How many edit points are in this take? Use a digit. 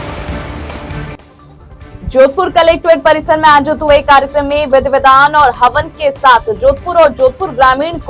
1